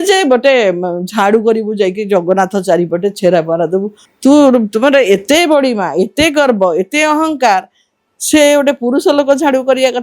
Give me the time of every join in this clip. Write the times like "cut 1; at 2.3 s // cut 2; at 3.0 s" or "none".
cut 1; at 4.0 s